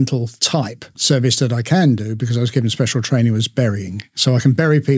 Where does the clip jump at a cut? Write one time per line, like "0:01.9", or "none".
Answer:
0:01.0
0:04.2